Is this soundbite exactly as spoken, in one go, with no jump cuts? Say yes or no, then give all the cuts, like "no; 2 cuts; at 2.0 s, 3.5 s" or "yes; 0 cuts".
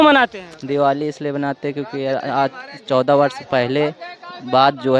yes; 0 cuts